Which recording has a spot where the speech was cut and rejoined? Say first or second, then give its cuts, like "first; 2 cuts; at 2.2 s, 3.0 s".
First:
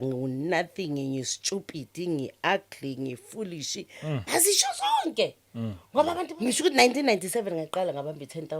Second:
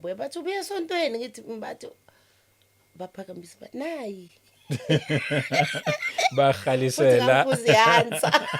first; 1 cut; at 6.3 s